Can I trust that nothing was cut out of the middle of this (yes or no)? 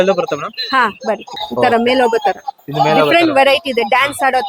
no